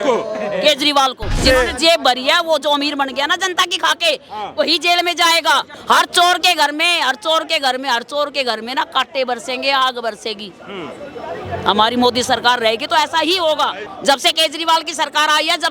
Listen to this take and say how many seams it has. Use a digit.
3